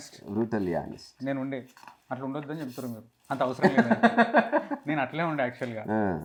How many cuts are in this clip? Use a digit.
0